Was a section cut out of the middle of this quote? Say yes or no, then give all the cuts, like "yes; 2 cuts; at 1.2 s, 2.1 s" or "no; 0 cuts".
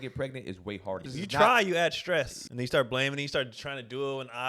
yes; 2 cuts; at 1.0 s, 2.4 s